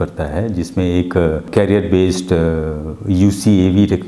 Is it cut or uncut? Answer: cut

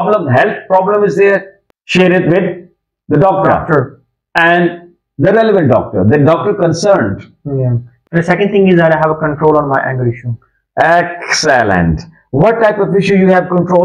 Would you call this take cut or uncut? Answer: cut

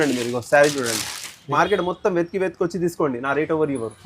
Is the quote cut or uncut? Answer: cut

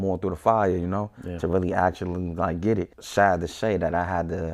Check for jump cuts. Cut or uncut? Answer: cut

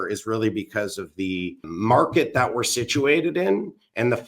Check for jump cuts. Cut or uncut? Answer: cut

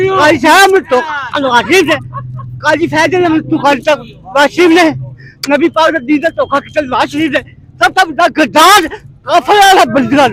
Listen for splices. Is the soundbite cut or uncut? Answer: uncut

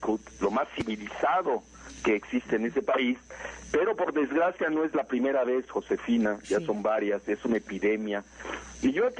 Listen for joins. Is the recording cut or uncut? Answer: uncut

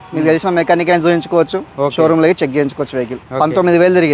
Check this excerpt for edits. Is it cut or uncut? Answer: cut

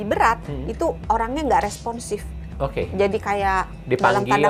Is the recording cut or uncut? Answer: uncut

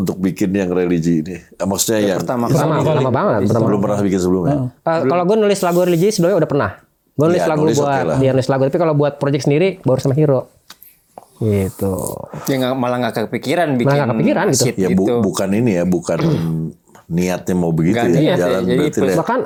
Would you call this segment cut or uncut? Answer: uncut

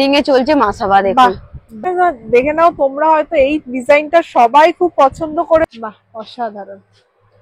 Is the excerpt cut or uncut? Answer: cut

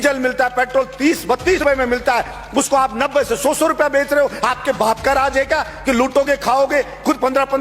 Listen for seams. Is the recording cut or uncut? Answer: cut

